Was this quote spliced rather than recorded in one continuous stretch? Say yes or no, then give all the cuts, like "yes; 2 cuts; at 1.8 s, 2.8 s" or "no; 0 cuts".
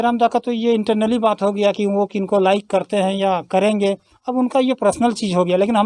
no; 0 cuts